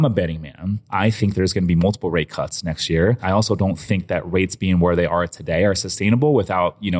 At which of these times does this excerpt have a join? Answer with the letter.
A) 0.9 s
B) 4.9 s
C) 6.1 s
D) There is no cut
A